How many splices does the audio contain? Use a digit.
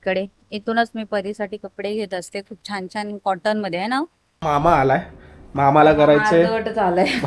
1